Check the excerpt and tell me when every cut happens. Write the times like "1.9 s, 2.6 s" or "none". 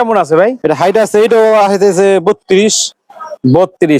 none